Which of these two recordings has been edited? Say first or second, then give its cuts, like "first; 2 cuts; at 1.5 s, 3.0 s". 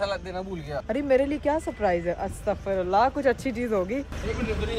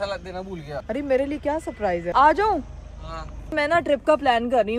second; 2 cuts; at 2.1 s, 3.5 s